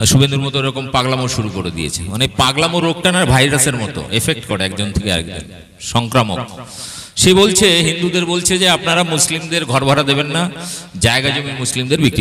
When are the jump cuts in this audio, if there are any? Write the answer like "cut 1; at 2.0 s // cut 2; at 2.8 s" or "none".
none